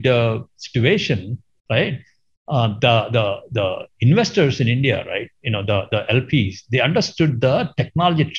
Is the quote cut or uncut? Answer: uncut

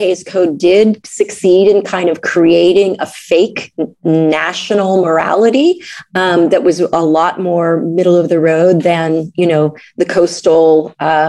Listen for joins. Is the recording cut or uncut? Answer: uncut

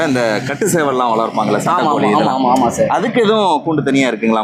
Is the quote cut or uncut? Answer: uncut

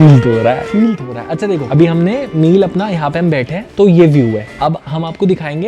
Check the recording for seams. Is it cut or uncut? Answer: uncut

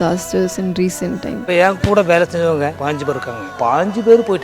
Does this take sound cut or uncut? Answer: cut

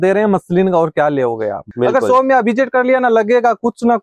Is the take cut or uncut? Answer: cut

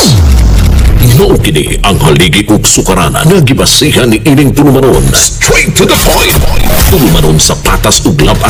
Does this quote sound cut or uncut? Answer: uncut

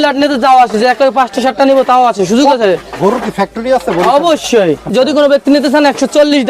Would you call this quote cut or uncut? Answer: cut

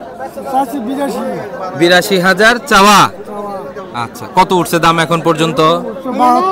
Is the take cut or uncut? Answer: uncut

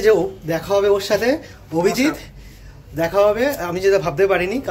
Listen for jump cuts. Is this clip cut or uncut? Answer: uncut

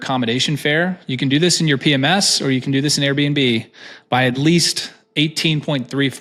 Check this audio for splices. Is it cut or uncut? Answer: uncut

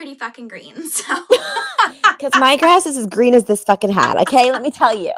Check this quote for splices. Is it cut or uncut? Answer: uncut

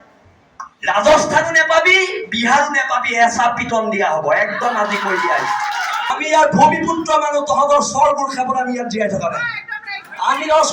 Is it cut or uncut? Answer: cut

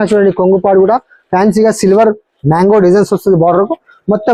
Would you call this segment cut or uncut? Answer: uncut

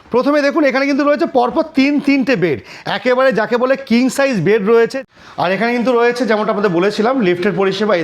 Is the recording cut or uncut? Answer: cut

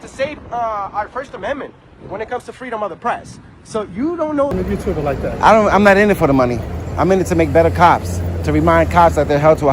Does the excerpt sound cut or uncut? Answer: cut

